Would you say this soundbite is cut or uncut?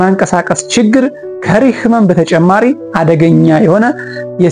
uncut